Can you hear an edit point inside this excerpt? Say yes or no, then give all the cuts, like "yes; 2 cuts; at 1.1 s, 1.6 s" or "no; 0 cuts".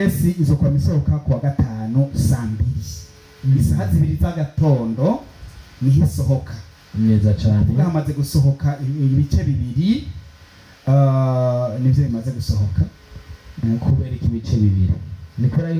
no; 0 cuts